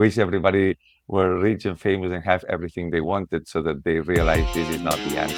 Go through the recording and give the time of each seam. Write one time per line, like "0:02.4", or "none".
none